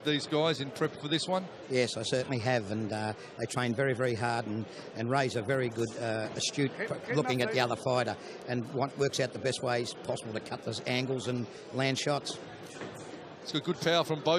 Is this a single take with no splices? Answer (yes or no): yes